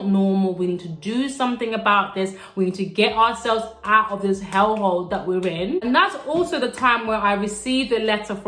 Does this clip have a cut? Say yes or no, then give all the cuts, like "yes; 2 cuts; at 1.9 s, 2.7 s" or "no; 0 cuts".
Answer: no; 0 cuts